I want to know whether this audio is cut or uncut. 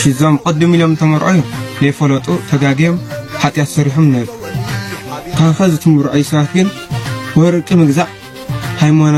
uncut